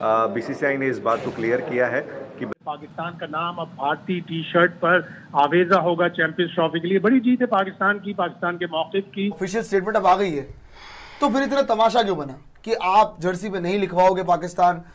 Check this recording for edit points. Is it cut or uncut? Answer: cut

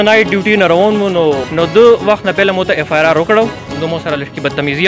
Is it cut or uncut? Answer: cut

